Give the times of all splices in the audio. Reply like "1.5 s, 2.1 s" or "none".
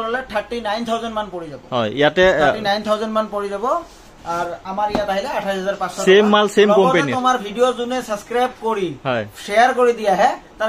none